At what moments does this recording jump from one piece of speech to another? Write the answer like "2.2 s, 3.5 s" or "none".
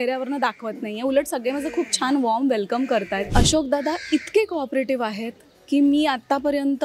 3.3 s